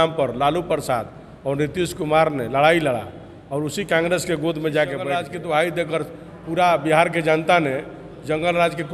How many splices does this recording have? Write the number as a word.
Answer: one